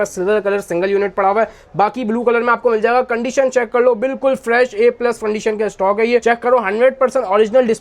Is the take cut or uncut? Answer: uncut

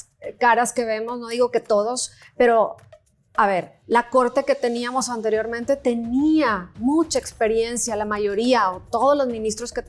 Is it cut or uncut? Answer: uncut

